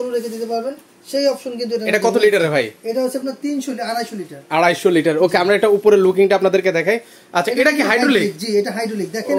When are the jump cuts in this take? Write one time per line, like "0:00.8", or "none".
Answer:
none